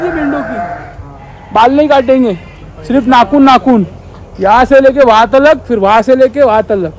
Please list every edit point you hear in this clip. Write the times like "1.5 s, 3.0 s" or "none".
none